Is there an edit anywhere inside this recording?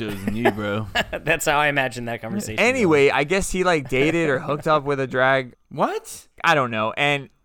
yes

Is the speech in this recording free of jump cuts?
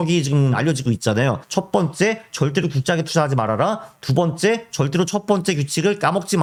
yes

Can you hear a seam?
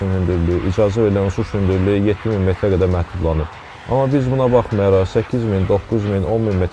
no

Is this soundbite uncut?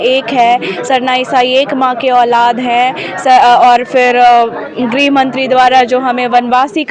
yes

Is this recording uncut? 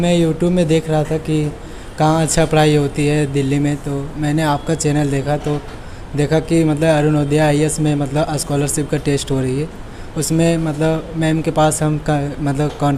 yes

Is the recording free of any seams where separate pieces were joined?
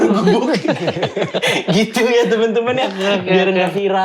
yes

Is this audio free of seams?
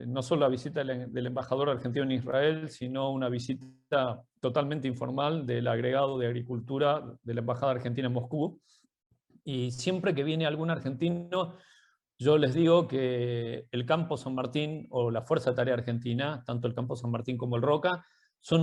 yes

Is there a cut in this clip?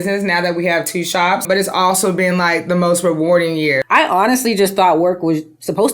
yes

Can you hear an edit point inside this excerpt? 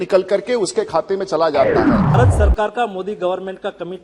yes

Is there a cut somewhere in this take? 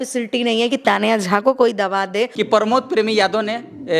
yes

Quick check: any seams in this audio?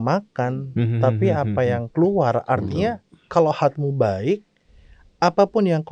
no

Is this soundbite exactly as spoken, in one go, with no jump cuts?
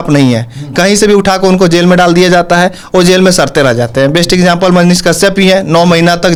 yes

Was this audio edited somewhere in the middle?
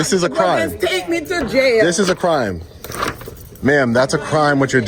no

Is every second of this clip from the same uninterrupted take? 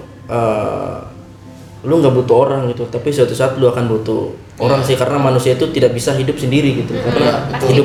yes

